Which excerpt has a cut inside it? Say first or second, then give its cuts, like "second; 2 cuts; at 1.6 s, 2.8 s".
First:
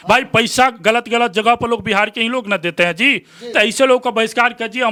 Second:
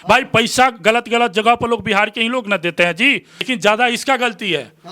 second; 1 cut; at 3.3 s